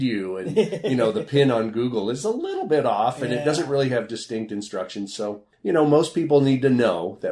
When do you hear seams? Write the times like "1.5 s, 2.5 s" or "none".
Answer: 5.5 s